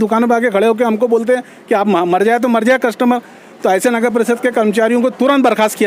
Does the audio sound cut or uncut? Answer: uncut